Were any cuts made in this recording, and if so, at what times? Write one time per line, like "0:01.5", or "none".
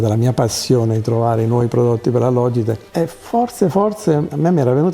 0:02.8